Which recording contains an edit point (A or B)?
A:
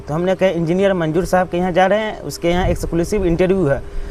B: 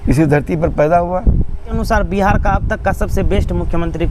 B